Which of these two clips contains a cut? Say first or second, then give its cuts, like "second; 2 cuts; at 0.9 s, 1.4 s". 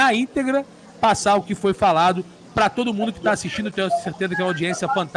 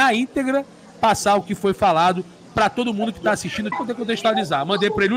second; 1 cut; at 3.7 s